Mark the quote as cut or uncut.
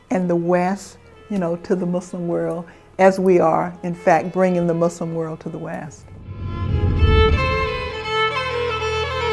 uncut